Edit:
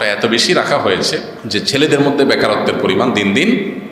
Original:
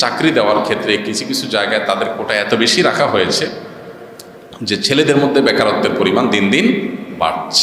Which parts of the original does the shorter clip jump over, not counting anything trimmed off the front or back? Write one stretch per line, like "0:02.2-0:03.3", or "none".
0:03.7-0:04.5